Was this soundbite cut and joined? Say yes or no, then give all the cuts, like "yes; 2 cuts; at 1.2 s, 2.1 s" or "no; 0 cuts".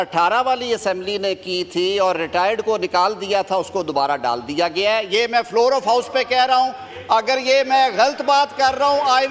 no; 0 cuts